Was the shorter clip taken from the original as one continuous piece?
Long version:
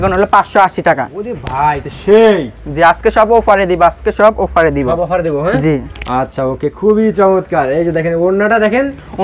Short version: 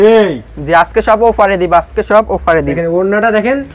no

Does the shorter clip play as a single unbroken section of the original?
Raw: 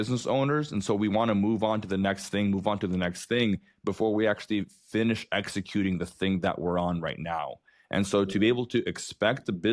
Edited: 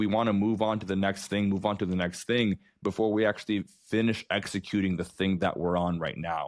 yes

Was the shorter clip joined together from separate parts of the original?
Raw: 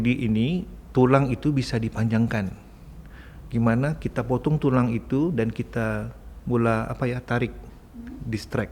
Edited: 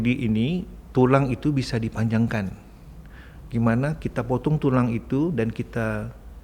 no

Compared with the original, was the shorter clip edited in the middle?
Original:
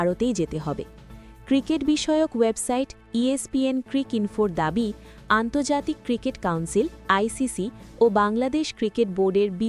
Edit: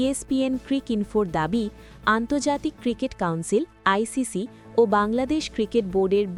no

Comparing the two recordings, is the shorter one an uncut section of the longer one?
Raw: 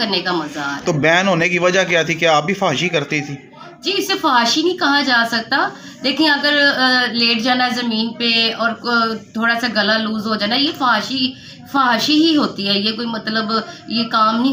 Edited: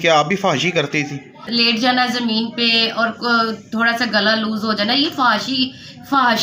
no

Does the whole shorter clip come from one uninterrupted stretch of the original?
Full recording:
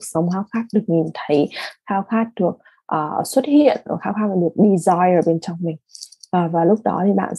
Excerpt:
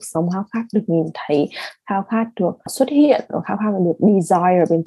no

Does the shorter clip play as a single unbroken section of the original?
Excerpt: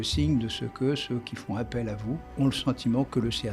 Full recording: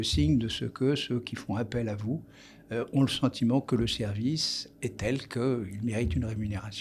no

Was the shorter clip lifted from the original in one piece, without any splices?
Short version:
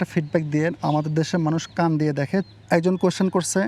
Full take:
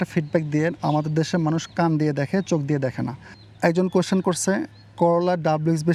no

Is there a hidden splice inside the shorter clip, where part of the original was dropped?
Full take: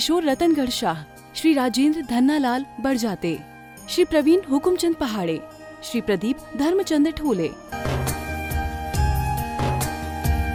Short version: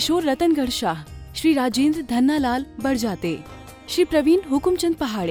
no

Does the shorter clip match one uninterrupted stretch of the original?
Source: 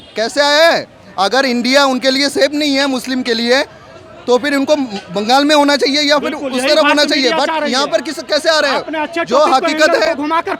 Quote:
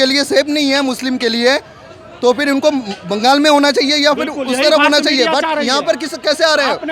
yes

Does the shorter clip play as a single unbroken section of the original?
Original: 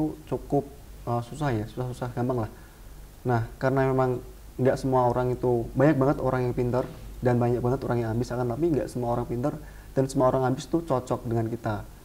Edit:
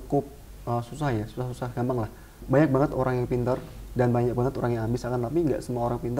no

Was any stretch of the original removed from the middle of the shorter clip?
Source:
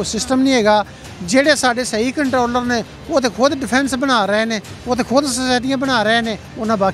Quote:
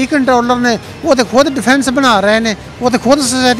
no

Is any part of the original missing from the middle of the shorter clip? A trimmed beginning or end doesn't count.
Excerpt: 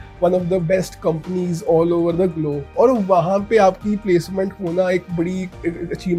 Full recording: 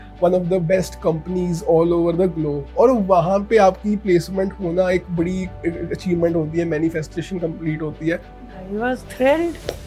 no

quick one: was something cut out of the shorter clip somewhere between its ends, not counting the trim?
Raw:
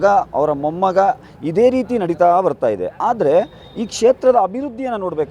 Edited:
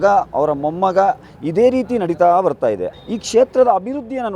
yes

